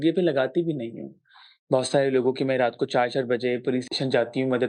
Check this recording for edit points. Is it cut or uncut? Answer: uncut